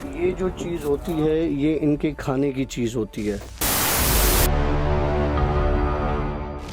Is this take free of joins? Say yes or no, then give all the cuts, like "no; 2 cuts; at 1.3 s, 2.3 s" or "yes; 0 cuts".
yes; 0 cuts